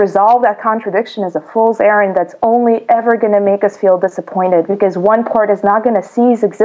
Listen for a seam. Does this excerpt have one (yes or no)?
no